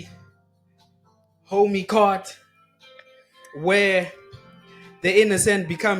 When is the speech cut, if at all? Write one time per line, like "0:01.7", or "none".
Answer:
none